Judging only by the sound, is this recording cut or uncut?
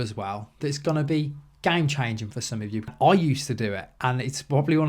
cut